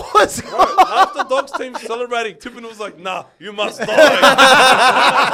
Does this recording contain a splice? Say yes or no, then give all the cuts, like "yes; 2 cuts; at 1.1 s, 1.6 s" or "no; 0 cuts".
no; 0 cuts